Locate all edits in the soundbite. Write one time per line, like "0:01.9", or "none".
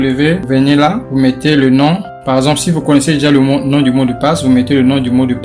none